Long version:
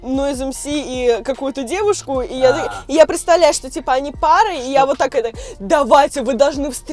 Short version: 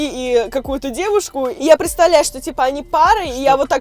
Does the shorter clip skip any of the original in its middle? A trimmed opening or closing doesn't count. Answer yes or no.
yes